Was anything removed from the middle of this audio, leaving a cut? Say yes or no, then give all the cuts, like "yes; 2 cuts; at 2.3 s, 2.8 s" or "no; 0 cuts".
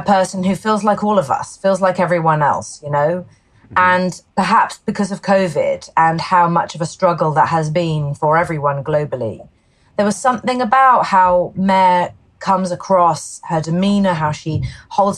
yes; 1 cut; at 4.2 s